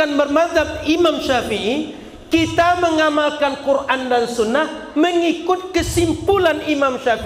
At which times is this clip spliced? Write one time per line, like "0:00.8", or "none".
none